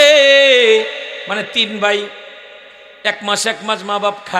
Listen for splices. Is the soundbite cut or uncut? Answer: cut